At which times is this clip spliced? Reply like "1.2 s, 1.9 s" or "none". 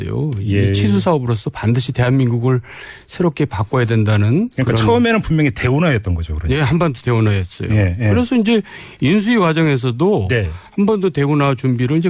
none